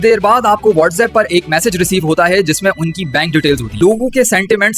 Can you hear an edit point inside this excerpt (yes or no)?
yes